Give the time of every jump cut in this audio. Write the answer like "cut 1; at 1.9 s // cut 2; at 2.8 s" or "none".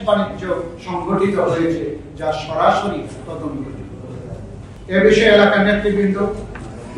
none